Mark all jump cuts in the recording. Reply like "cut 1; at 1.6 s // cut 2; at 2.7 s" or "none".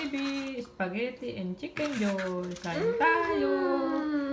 none